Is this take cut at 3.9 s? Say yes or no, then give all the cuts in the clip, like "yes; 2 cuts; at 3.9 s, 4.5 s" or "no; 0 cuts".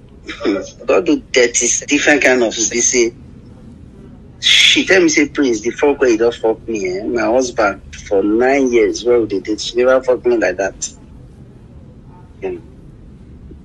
no; 2 cuts; at 1.7 s, 2.6 s